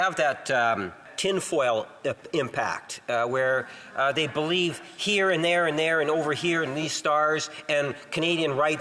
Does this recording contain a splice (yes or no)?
yes